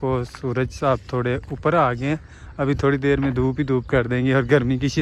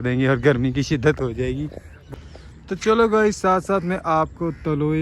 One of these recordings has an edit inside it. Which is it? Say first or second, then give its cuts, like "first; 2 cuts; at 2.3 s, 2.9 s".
second; 1 cut; at 1.9 s